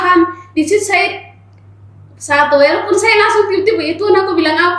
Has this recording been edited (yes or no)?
no